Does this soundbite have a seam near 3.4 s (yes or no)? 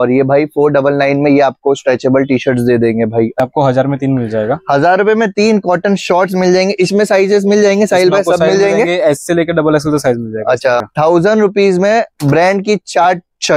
yes